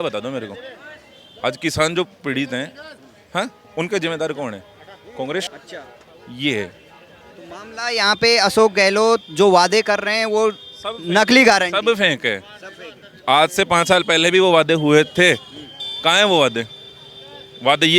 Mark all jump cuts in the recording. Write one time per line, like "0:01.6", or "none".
none